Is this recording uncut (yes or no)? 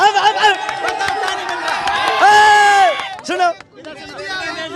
yes